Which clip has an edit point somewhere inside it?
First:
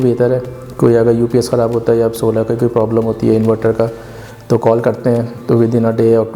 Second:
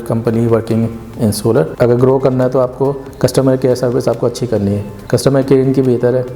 second; 3 cuts; at 1.7 s, 3.1 s, 4.9 s

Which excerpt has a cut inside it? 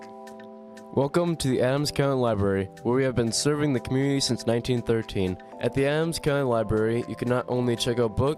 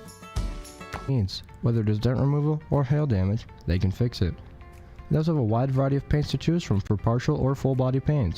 second; 1 cut; at 1.1 s

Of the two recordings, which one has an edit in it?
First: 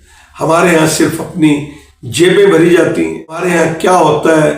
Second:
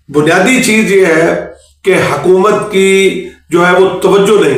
first; 1 cut; at 3.4 s

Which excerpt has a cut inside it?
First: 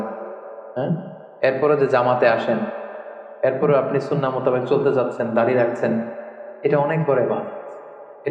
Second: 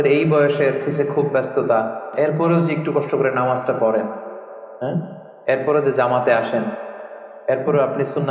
second; 2 cuts; at 0.9 s, 2.1 s

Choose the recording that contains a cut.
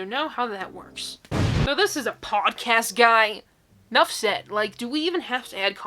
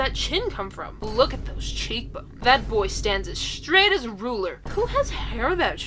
first; 1 cut; at 1.7 s

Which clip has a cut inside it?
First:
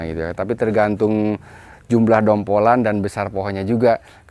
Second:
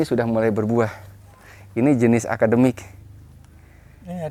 first; 1 cut; at 1.7 s

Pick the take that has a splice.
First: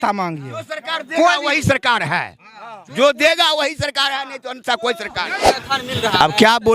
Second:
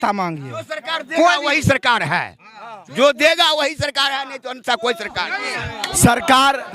first; 1 cut; at 5.6 s

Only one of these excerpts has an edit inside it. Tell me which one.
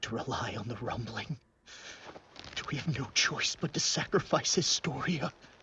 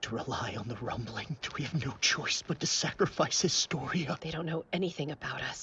second; 2 cuts; at 1.5 s, 4.2 s

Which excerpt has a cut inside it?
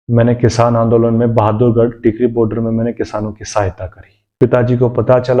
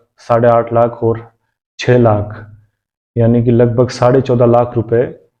first; 1 cut; at 4.4 s

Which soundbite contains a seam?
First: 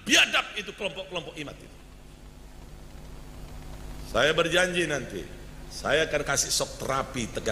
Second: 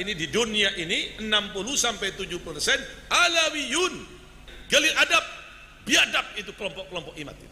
second; 1 cut; at 4.5 s

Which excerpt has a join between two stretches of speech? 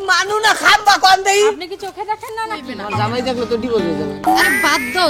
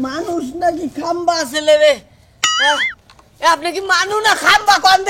first; 1 cut; at 2.8 s

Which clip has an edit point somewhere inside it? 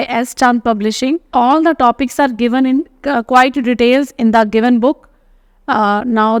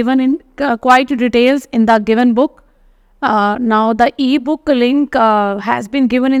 first; 1 cut; at 1.2 s

